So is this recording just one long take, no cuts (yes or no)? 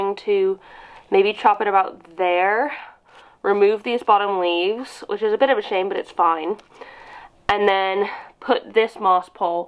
yes